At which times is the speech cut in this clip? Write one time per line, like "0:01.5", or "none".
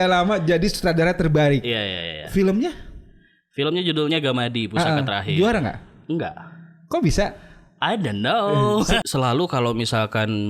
0:09.0